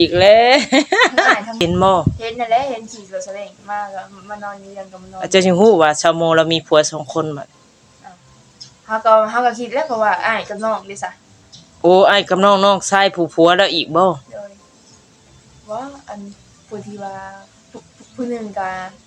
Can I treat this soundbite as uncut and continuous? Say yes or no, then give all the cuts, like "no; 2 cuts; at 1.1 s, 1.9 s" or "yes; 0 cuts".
no; 1 cut; at 1.6 s